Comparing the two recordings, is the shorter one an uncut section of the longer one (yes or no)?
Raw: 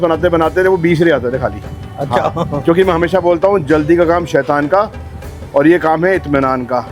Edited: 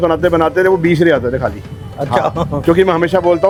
yes